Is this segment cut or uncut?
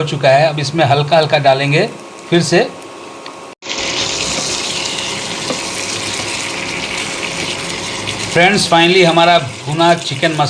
cut